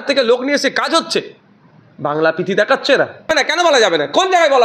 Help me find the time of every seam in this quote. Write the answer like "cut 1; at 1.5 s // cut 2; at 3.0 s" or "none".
cut 1; at 3.3 s